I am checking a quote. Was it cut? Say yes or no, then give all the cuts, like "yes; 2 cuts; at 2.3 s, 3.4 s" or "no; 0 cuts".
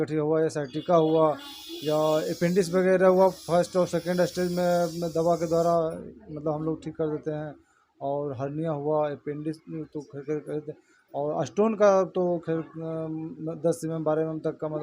no; 0 cuts